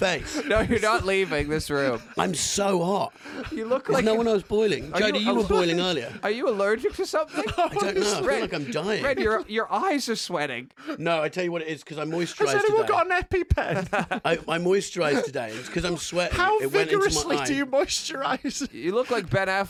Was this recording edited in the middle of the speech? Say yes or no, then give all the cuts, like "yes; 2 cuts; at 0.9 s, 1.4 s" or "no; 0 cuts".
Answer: no; 0 cuts